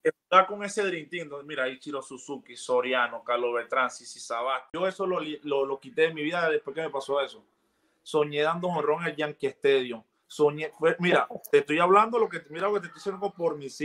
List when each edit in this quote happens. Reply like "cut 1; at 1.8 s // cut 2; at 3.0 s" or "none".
cut 1; at 4.7 s